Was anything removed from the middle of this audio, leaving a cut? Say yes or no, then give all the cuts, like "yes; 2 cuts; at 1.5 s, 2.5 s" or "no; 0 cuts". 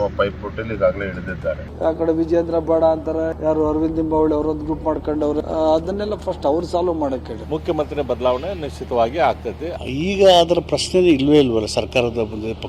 yes; 5 cuts; at 1.7 s, 3.3 s, 5.4 s, 7.3 s, 9.7 s